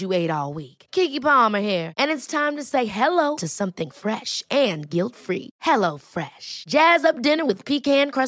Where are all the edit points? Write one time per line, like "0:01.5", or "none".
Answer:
none